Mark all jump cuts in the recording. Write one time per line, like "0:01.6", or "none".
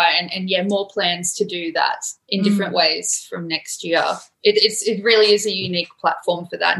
0:04.3